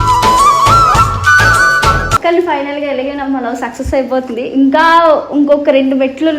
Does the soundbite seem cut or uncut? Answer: cut